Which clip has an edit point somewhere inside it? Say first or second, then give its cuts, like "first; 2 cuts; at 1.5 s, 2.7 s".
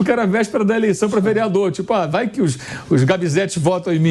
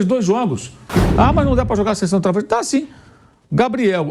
second; 1 cut; at 1.0 s